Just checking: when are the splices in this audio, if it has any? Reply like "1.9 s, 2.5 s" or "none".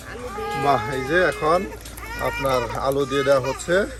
none

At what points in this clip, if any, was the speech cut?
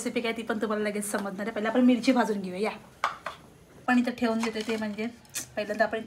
3.8 s

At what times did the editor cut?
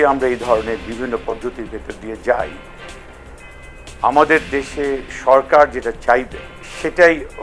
none

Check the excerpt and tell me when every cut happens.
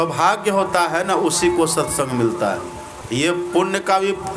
2.9 s

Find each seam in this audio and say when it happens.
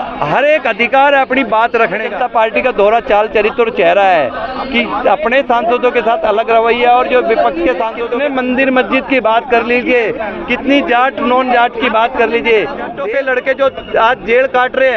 2.1 s, 8.0 s, 12.9 s

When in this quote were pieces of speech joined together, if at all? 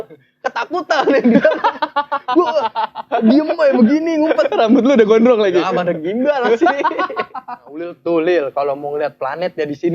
7.9 s

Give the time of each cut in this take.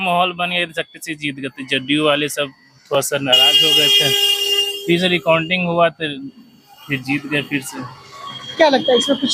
none

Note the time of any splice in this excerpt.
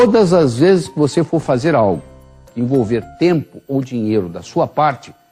none

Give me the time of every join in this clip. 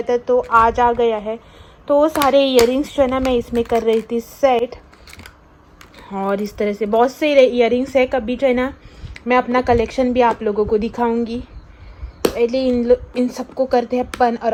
none

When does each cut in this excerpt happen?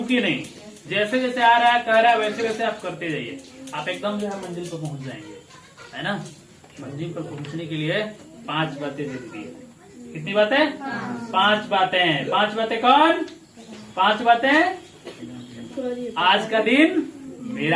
none

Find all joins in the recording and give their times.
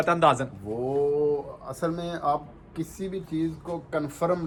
none

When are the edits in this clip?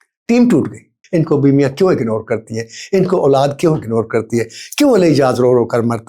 1.0 s

